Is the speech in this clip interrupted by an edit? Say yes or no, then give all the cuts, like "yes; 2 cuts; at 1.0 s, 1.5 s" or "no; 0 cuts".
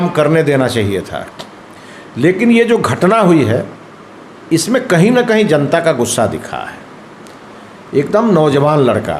no; 0 cuts